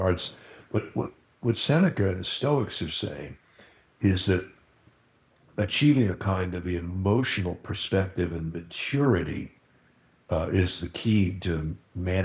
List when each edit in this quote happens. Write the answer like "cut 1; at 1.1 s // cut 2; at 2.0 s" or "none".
none